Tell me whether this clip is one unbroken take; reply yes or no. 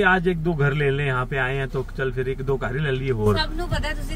yes